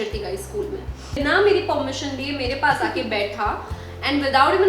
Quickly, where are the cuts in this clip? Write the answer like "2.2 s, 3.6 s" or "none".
1.2 s